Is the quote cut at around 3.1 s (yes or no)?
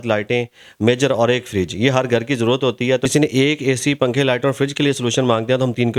yes